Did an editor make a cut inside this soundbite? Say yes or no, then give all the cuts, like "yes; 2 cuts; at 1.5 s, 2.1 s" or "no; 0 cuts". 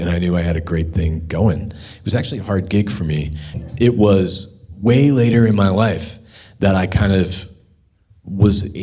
yes; 1 cut; at 3.6 s